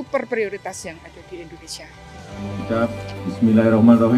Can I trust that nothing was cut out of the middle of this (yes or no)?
no